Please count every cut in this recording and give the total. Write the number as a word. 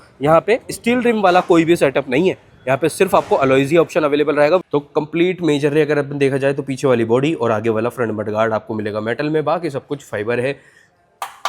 one